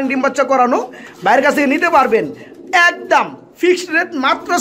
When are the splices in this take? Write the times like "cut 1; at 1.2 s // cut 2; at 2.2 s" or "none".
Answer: none